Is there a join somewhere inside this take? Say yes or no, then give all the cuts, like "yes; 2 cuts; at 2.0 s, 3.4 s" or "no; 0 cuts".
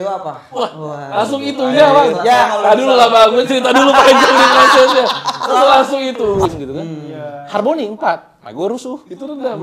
yes; 1 cut; at 6.5 s